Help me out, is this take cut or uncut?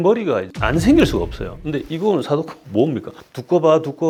uncut